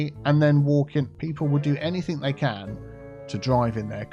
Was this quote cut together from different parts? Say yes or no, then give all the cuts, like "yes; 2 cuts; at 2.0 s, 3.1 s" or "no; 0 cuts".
yes; 1 cut; at 1.2 s